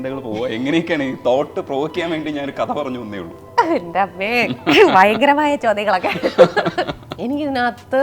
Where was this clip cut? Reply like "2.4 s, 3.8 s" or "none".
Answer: 7.1 s